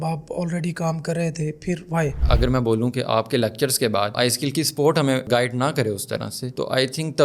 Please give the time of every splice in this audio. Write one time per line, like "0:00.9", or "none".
0:02.2
0:04.1
0:05.3